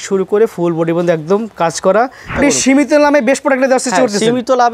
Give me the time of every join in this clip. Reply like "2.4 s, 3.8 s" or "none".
2.4 s